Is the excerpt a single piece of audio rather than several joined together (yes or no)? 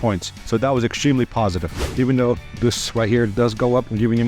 no